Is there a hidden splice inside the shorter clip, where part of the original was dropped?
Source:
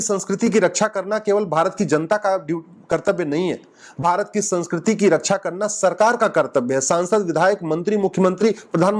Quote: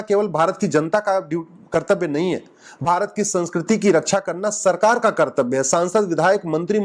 no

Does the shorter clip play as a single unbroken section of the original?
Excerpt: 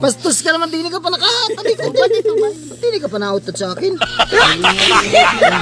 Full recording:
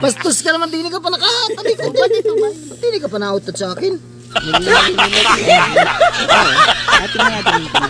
no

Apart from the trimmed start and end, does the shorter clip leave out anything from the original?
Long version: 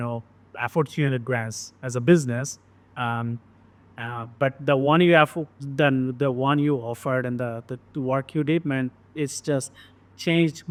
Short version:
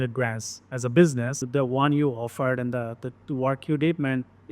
yes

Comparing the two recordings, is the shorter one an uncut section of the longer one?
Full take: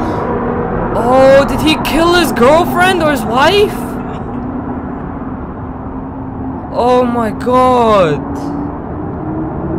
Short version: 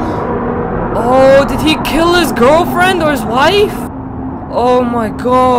no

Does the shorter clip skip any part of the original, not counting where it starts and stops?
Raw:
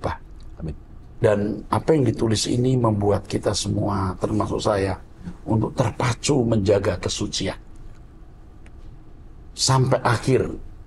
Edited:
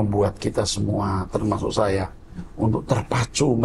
no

